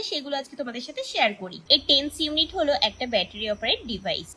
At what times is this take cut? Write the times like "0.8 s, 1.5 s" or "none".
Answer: none